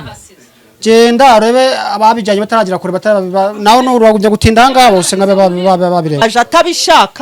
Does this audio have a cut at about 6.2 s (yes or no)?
yes